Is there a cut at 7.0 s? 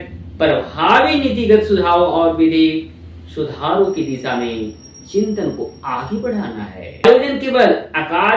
yes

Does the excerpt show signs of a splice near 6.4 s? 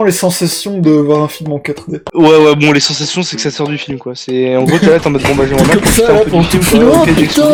no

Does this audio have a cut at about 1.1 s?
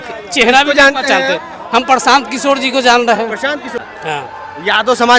no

